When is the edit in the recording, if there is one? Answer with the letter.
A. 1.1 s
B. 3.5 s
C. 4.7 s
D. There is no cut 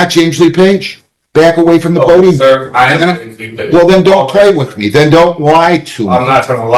D